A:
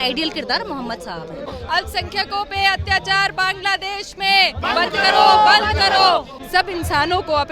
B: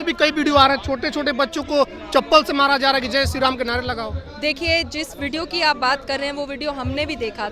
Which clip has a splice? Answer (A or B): A